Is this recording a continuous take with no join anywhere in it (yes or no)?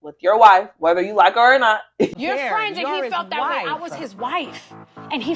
no